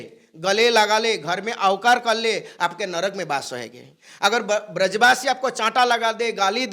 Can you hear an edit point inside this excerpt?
no; 0 cuts

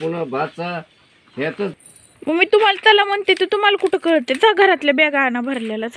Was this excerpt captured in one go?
no; 1 cut; at 1.8 s

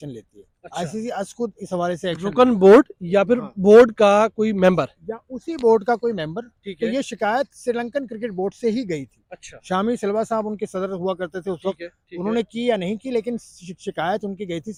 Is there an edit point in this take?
no; 0 cuts

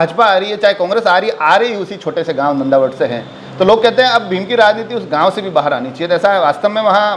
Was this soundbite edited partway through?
no; 0 cuts

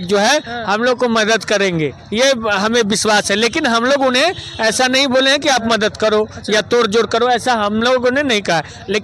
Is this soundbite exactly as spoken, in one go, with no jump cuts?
yes; 0 cuts

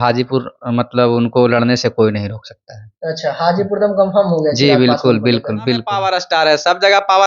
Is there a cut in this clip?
yes; 1 cut; at 5.9 s

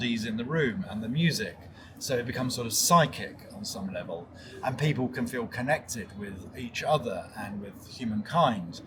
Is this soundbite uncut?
yes; 0 cuts

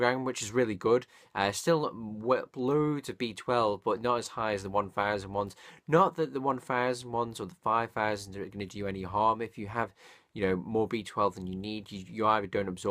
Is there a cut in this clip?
yes; 1 cut; at 9.6 s

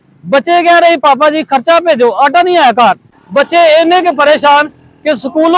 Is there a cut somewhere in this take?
no; 0 cuts

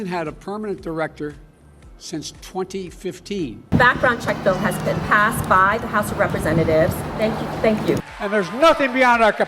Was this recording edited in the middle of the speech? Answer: yes; 2 cuts; at 3.6 s, 8.1 s

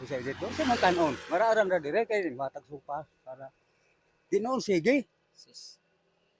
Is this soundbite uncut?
yes; 0 cuts

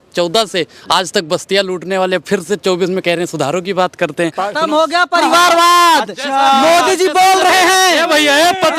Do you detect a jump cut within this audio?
yes; 1 cut; at 4.4 s

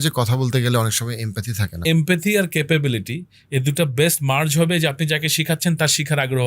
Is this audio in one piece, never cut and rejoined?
no; 1 cut; at 1.8 s

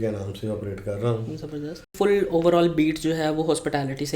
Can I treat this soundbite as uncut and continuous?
no; 1 cut; at 1.9 s

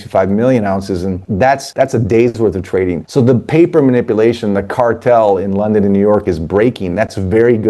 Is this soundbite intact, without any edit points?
no; 2 cuts; at 1.5 s, 3.0 s

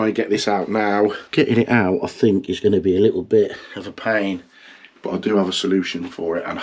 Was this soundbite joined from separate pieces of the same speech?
no; 0 cuts

